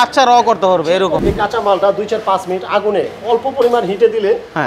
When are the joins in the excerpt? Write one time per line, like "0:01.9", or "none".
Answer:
0:01.2

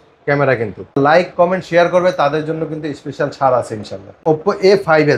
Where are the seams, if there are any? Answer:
0:01.0
0:04.0

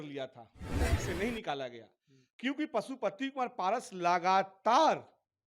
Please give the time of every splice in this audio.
0:01.0

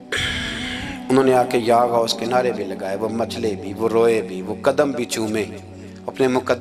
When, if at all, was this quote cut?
none

